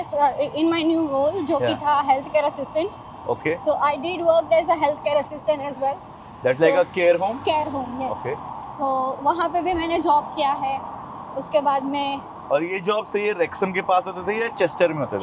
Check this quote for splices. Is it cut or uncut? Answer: uncut